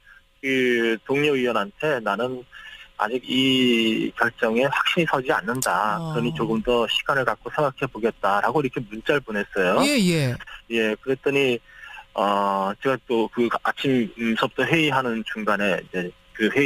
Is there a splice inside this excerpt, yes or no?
yes